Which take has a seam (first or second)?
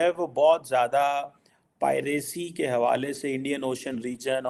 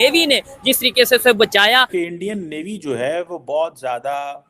second